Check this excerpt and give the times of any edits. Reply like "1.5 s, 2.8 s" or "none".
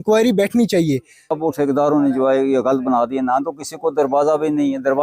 1.4 s